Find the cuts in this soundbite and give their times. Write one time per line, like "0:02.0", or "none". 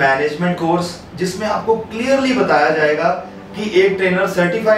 none

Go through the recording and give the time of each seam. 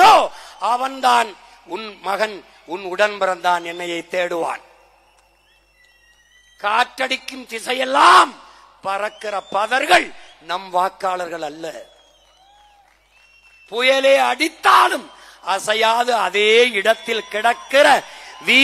none

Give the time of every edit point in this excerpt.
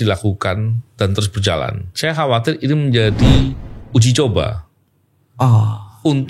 0:01.8

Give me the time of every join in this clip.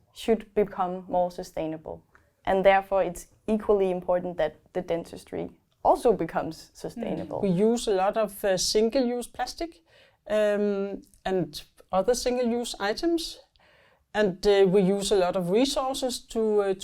0:07.3

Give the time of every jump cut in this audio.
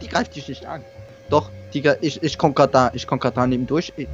0:01.1

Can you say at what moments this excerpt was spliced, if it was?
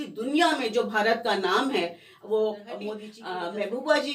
0:02.7

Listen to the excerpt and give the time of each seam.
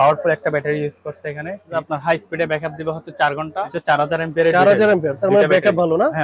0:01.6
0:03.8

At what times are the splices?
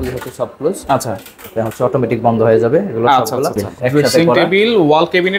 0:03.7

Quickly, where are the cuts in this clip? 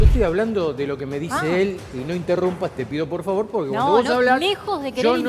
none

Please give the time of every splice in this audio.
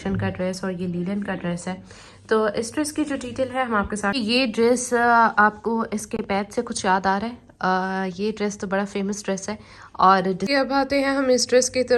0:04.1
0:10.4

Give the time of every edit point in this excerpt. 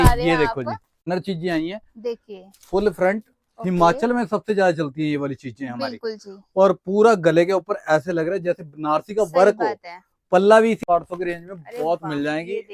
0:01.1
0:10.8

